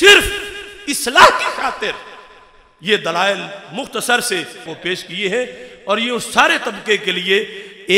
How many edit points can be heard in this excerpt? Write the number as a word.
one